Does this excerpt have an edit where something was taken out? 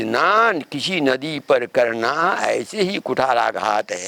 no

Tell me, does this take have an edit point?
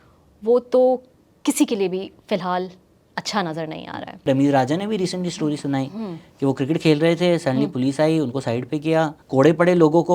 yes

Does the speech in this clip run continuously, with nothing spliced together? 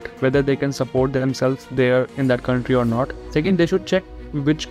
no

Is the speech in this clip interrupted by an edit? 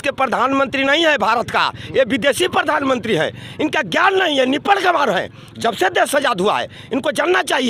no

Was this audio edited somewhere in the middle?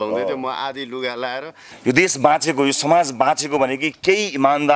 yes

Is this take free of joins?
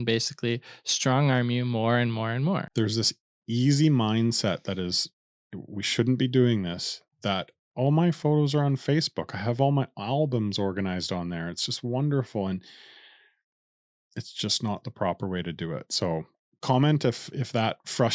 yes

